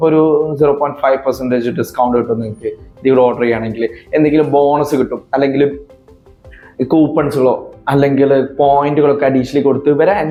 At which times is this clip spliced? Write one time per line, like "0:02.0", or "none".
none